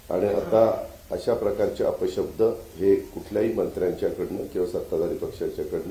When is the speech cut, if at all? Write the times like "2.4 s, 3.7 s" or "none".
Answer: none